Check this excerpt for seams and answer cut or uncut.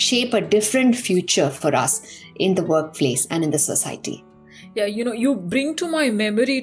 uncut